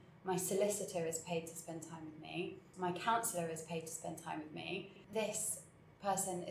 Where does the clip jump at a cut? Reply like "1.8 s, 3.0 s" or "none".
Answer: 2.6 s, 5.0 s